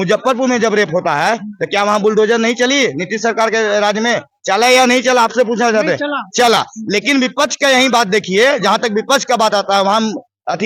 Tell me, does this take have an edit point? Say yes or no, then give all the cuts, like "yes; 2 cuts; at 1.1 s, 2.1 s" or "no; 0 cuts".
no; 0 cuts